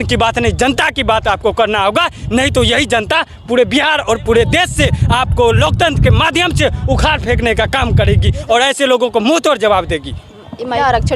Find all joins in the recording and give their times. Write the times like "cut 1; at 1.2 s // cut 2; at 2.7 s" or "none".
none